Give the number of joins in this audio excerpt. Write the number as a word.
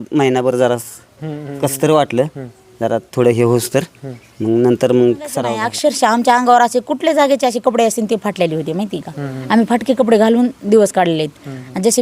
one